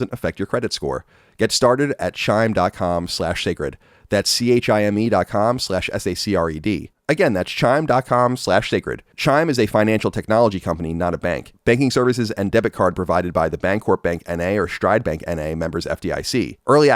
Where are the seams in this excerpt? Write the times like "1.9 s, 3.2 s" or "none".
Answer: 9.0 s